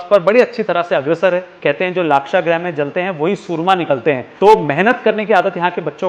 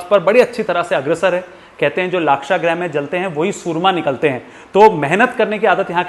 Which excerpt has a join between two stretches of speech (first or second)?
first